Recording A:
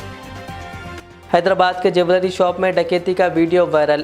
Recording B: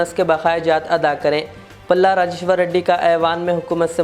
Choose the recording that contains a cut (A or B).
A